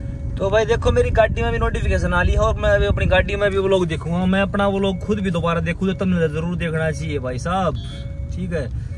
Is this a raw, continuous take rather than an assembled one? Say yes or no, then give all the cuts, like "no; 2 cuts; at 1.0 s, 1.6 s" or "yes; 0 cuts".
yes; 0 cuts